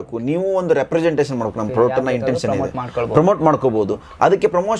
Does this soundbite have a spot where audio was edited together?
no; 0 cuts

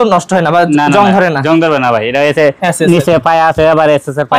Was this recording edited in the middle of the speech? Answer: no; 0 cuts

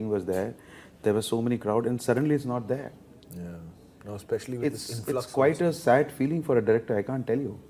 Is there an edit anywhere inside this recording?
no; 0 cuts

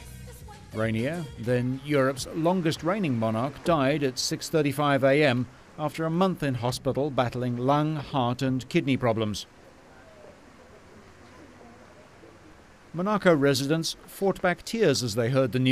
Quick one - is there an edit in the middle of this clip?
yes; 1 cut; at 8.2 s

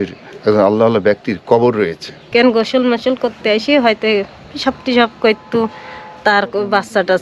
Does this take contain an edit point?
yes; 1 cut; at 2.3 s

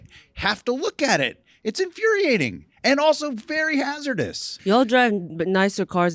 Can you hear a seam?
yes; 1 cut; at 4.5 s

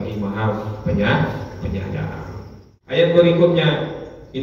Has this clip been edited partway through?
yes; 1 cut; at 3.0 s

